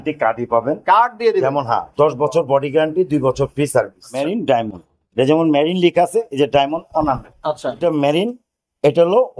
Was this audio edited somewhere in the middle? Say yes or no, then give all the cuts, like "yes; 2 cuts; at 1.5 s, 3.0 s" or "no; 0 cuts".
yes; 2 cuts; at 4.3 s, 7.8 s